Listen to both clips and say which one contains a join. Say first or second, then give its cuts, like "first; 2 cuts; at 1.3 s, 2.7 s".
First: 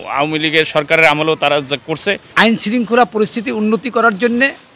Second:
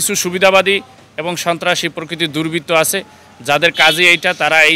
first; 1 cut; at 2.2 s